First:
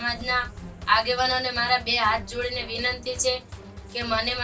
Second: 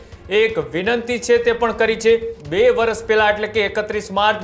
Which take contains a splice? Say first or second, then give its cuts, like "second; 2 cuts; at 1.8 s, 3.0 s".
second; 1 cut; at 2.4 s